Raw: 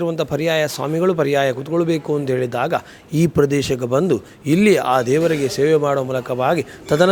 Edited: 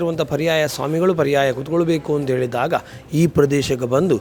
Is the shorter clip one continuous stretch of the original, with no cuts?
yes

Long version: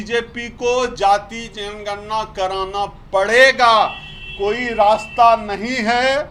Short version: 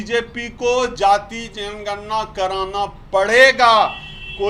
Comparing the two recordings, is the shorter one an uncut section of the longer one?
yes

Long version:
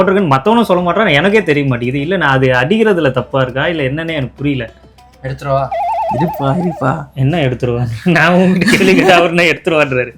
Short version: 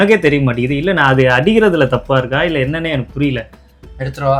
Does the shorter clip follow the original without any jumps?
yes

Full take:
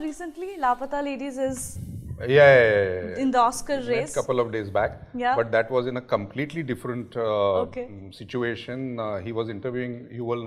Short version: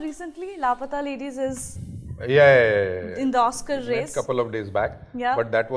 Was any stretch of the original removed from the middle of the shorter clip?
no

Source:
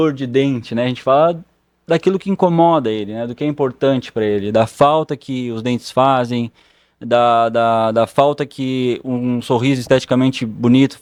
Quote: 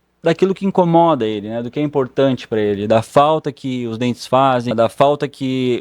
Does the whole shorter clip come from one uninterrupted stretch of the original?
no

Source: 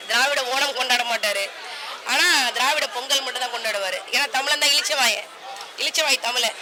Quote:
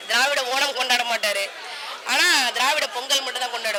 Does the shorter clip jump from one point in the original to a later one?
no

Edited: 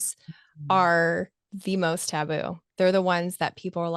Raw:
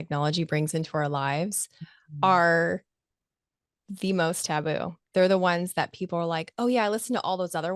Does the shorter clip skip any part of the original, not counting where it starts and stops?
yes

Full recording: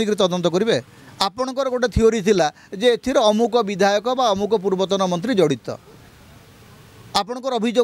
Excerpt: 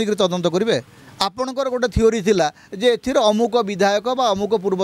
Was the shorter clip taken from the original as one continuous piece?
yes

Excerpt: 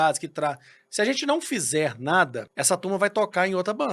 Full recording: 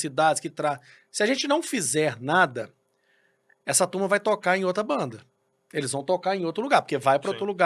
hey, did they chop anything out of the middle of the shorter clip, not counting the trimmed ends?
yes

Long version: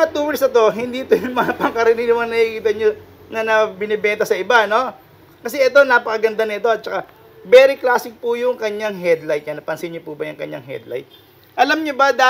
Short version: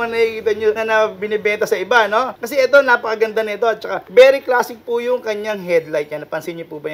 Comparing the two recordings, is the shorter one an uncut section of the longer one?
no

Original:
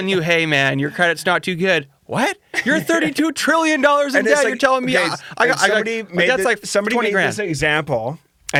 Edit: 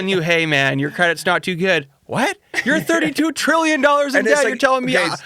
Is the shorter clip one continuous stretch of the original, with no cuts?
yes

